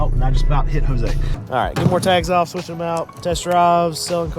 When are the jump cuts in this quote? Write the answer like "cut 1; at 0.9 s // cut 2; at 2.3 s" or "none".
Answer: cut 1; at 1.4 s